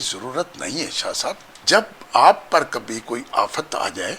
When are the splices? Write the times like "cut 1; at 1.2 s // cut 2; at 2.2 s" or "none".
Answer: cut 1; at 1.5 s

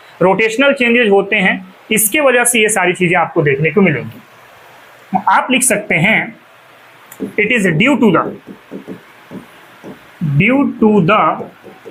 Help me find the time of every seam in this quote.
none

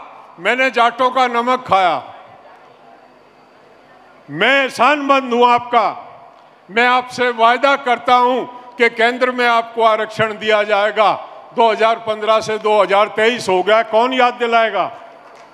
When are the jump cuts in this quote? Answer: none

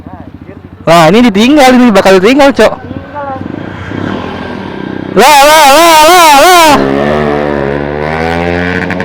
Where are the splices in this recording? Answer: cut 1; at 7.9 s

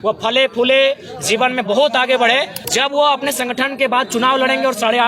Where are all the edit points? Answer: cut 1; at 2.6 s

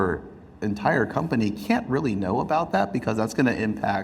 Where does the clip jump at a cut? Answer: none

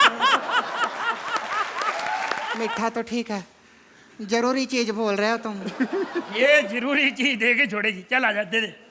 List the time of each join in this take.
cut 1; at 2.5 s

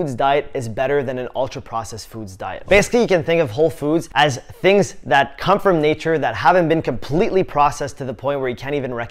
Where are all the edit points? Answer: cut 1; at 2.6 s

